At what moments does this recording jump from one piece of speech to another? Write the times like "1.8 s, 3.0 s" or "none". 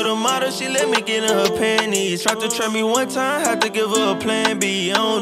none